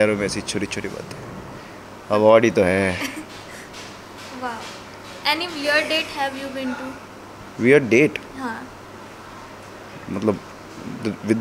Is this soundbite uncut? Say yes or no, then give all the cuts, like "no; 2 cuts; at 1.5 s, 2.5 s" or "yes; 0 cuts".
yes; 0 cuts